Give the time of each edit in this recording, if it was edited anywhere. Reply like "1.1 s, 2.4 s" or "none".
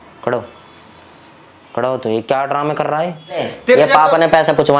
3.4 s